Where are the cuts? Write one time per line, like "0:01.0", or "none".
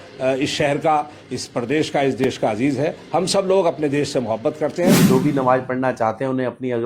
0:04.9